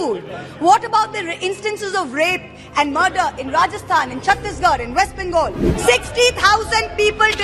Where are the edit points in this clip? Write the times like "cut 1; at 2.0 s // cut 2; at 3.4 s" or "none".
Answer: cut 1; at 5.6 s